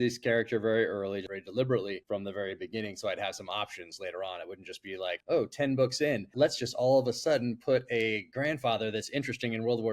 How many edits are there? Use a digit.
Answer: 4